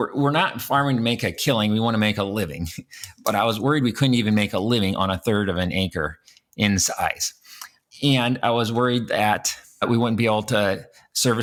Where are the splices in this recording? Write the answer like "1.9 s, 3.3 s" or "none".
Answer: none